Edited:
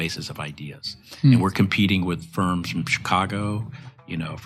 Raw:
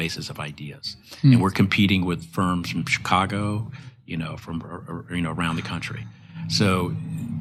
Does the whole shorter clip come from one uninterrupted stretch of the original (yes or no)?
yes